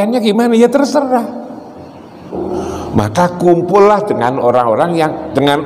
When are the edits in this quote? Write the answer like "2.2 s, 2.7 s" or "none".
2.4 s